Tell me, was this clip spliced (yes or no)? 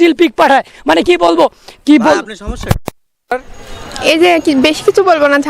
yes